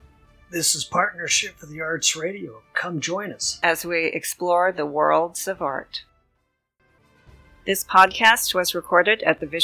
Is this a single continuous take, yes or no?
no